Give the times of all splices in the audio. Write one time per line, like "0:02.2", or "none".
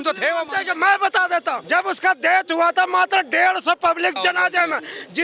0:01.6
0:04.2